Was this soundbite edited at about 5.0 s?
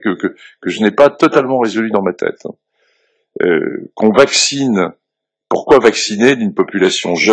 no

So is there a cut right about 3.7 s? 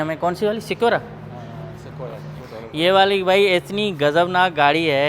no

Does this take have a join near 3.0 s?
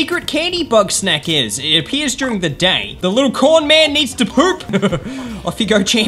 yes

